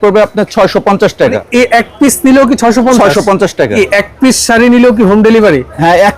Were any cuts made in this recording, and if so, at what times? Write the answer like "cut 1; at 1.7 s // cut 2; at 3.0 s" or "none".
cut 1; at 1.4 s // cut 2; at 3.8 s